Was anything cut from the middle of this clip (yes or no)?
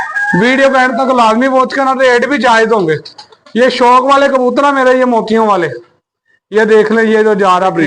no